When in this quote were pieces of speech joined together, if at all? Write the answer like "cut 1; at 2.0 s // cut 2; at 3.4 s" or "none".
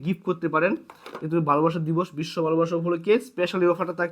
none